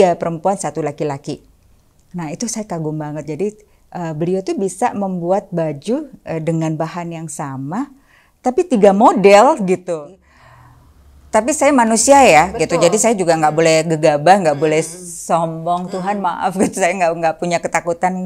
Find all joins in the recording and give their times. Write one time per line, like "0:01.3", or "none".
0:09.8